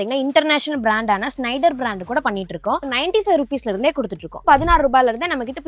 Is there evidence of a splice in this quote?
yes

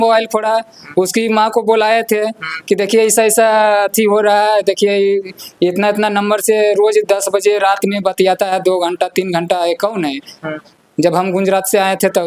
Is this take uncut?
yes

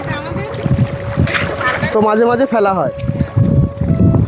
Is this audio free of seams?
yes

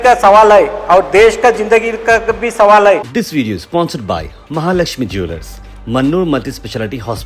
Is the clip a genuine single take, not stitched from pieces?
no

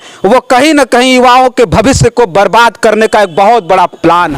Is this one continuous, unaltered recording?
yes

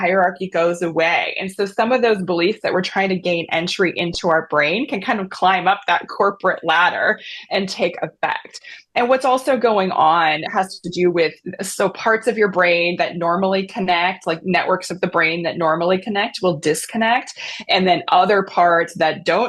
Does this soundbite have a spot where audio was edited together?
no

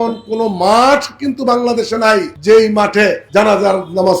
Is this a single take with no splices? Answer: no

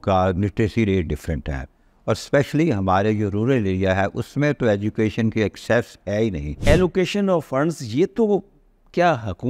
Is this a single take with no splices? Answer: no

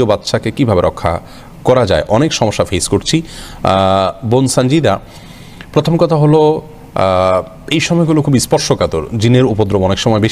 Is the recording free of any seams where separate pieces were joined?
yes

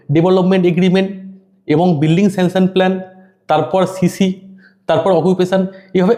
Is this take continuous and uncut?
yes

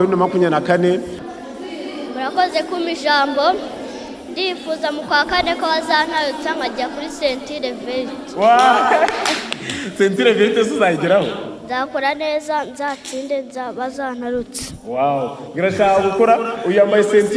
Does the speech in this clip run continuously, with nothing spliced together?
no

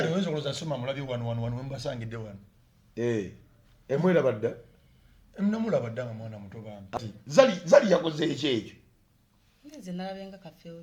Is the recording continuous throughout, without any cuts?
no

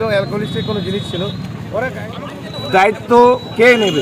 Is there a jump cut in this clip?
yes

